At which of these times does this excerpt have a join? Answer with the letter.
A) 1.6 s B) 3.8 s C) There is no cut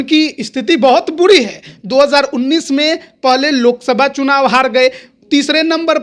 C